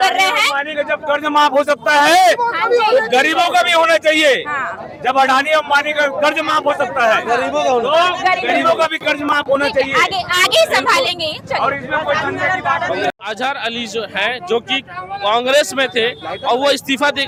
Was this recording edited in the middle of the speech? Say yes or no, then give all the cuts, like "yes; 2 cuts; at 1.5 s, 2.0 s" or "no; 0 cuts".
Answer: no; 0 cuts